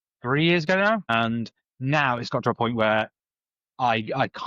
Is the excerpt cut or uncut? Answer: cut